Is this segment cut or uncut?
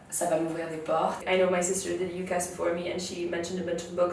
cut